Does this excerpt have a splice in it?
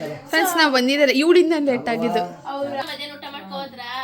yes; 1 cut; at 2.8 s

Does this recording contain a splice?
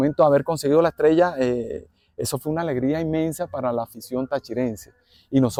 no; 0 cuts

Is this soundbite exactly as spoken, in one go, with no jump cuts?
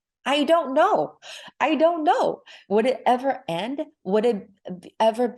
yes; 0 cuts

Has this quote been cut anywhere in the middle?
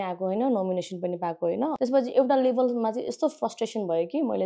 yes; 1 cut; at 1.7 s

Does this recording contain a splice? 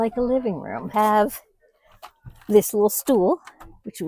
yes; 1 cut; at 0.9 s

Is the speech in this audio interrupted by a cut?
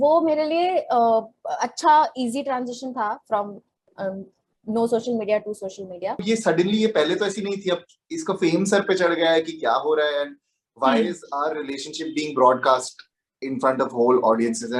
yes; 1 cut; at 6.2 s

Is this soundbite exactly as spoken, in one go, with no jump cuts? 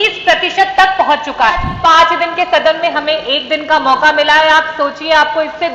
no; 1 cut; at 1.7 s

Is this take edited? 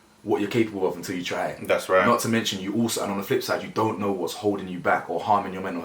no; 0 cuts

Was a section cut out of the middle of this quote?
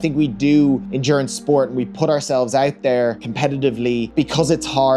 yes; 3 cuts; at 0.9 s, 3.3 s, 4.1 s

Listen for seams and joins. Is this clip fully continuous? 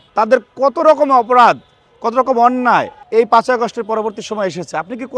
no; 1 cut; at 3.0 s

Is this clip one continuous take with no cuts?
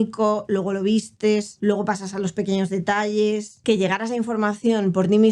no; 1 cut; at 3.5 s

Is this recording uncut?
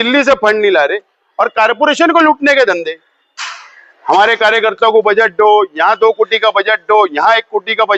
yes; 0 cuts

